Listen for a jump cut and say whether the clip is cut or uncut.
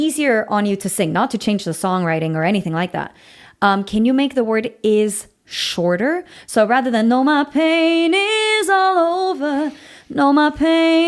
uncut